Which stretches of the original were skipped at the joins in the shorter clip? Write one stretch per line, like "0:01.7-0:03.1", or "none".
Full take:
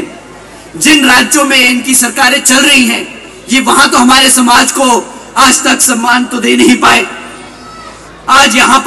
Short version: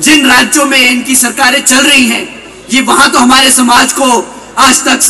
none